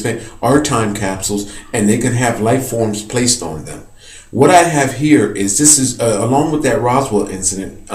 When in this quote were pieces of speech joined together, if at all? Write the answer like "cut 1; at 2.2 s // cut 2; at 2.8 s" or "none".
cut 1; at 1.0 s